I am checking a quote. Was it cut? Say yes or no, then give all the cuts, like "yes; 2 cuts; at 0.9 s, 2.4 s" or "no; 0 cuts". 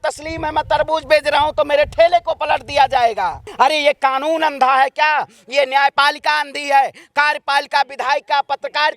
yes; 1 cut; at 3.4 s